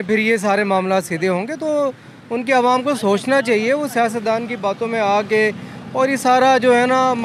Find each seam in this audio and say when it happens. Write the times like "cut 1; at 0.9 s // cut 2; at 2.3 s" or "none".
none